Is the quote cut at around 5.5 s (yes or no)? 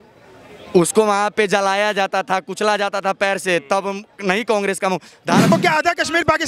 yes